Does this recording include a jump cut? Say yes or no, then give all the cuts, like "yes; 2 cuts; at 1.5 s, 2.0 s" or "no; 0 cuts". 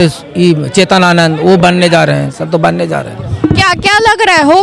no; 0 cuts